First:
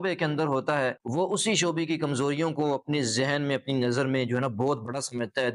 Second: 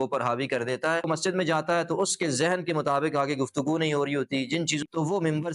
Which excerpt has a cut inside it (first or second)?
second